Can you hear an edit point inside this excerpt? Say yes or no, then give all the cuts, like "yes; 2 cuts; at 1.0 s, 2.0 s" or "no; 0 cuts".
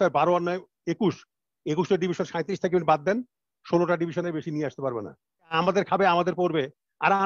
yes; 1 cut; at 5.5 s